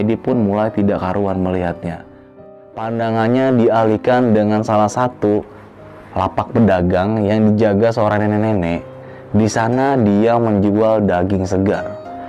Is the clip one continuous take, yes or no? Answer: no